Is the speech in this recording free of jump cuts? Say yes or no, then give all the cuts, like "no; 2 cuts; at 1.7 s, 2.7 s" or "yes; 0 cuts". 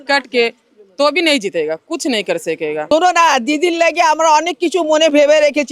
no; 1 cut; at 2.9 s